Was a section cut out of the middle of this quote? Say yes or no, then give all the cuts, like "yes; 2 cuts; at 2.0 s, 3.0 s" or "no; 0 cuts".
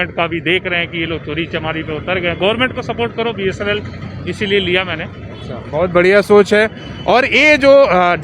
no; 0 cuts